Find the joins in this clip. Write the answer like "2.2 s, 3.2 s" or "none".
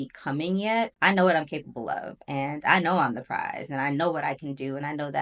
0.9 s